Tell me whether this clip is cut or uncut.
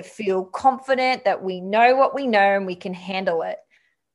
uncut